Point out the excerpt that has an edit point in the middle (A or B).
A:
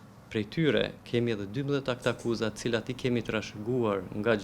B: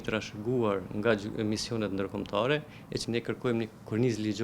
B